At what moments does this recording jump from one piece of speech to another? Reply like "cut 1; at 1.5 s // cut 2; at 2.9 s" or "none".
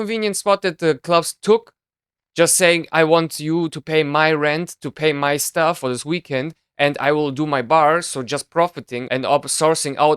cut 1; at 5.8 s // cut 2; at 8.9 s